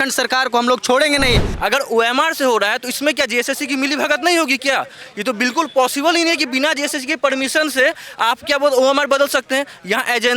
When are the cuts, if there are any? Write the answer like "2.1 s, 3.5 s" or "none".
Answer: 1.5 s